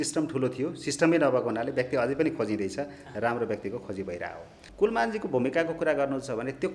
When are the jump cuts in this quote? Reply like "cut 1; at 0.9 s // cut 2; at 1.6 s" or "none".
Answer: cut 1; at 4.6 s